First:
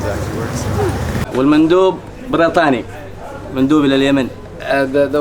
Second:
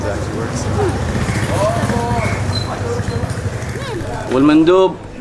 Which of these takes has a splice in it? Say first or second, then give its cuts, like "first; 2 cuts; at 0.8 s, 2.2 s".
first; 1 cut; at 1.3 s